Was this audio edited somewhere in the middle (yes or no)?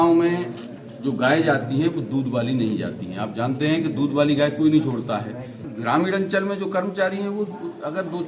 yes